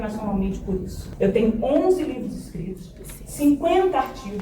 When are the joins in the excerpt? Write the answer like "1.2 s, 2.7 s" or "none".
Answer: 1.0 s, 2.0 s